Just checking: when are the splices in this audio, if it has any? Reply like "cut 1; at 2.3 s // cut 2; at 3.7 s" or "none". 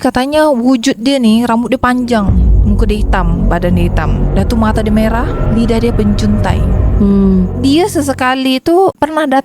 none